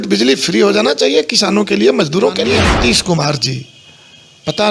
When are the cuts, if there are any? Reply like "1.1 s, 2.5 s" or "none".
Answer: 2.7 s